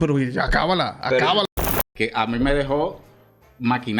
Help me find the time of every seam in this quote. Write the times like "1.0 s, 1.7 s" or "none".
1.5 s